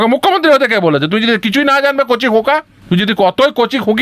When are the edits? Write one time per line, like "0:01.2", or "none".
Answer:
0:02.7